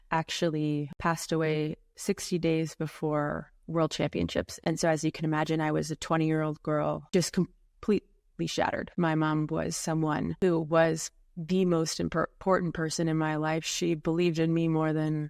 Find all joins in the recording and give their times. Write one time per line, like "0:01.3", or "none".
0:00.9
0:04.5
0:07.0
0:08.9
0:10.3